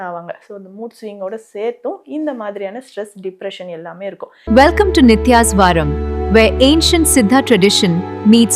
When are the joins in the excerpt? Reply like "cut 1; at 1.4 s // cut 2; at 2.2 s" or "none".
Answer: cut 1; at 4.5 s